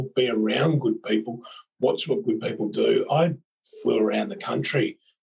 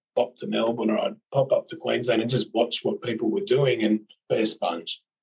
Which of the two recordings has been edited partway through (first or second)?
second